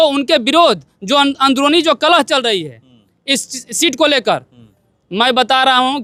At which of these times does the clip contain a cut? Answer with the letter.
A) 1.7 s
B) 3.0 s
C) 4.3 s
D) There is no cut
D